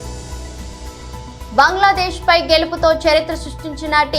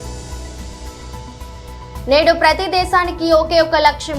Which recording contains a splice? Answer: second; 1 cut; at 1.2 s

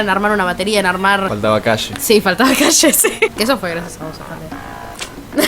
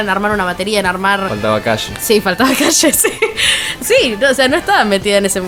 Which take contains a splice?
first; 1 cut; at 3.3 s

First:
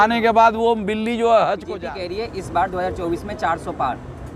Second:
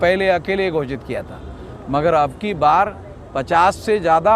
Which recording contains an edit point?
first; 1 cut; at 1.7 s

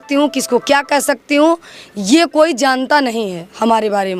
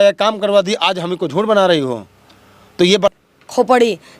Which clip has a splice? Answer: second; 1 cut; at 3.1 s

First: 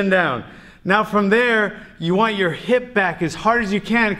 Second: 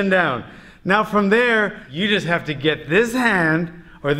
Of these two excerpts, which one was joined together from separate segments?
second; 1 cut; at 1.8 s

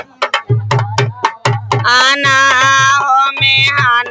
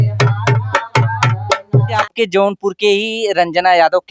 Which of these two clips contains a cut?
second; 1 cut; at 2.0 s

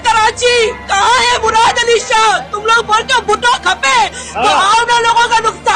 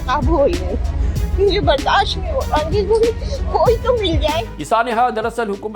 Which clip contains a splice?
second; 1 cut; at 4.4 s

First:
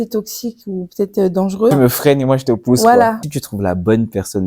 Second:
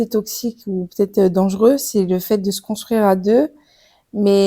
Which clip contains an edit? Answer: first; 2 cuts; at 1.7 s, 3.2 s

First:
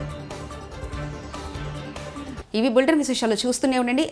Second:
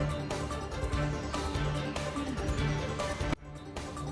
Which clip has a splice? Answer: second; 1 cut; at 2.4 s

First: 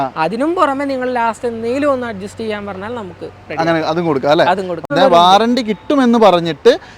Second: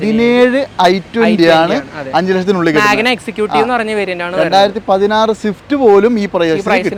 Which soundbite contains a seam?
first; 1 cut; at 4.9 s

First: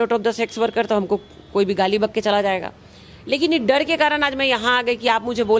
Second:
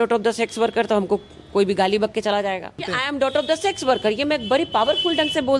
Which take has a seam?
second; 1 cut; at 2.9 s

